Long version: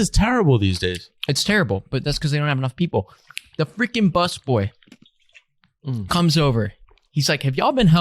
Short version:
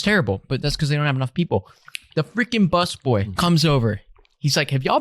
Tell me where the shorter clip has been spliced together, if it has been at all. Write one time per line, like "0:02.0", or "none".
0:03.3